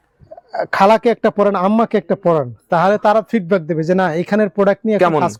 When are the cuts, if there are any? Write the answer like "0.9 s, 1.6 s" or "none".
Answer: none